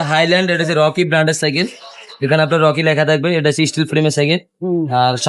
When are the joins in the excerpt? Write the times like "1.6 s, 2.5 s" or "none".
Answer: none